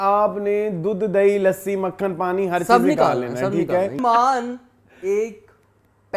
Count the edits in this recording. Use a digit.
1